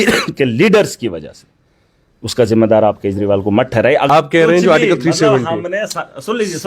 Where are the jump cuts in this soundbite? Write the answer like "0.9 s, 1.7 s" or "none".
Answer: 4.1 s